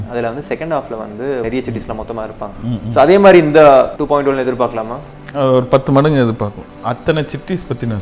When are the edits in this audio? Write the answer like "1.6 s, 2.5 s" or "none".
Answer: 1.4 s, 4.0 s, 6.7 s